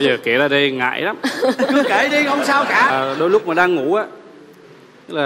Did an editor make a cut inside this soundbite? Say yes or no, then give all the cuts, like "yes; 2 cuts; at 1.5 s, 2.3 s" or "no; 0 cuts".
yes; 1 cut; at 2.9 s